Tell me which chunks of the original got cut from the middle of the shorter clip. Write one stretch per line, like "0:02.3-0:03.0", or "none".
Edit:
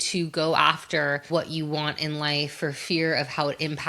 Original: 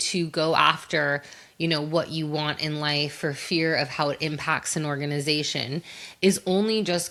0:01.3-0:01.9